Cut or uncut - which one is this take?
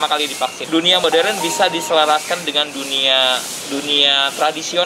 cut